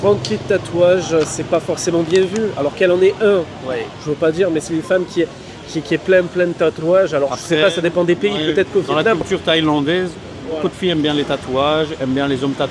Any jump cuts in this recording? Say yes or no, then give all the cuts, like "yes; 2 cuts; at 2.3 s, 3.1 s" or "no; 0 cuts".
no; 0 cuts